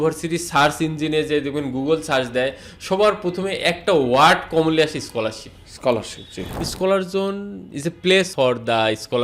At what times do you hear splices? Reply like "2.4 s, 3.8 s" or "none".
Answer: 6.5 s, 8.3 s